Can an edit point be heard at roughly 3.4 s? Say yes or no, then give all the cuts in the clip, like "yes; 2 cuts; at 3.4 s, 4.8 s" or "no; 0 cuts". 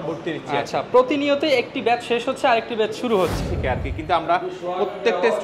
yes; 1 cut; at 3.4 s